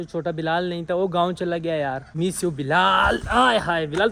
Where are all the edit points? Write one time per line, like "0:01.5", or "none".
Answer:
0:02.1

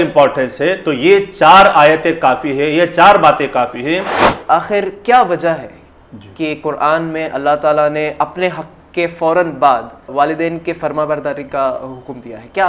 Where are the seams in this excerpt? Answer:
0:04.3
0:10.1

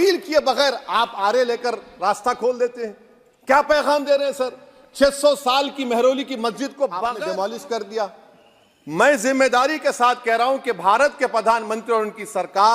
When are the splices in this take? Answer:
0:07.1

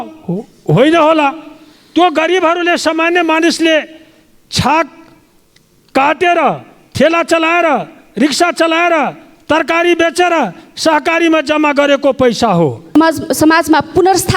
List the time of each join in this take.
0:12.9

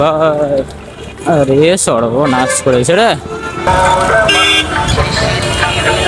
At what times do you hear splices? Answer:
0:03.6

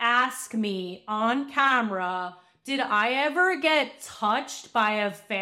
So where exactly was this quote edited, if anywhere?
none

